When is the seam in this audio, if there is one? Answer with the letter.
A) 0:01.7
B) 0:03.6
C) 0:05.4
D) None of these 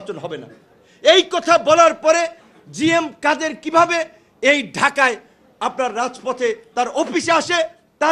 D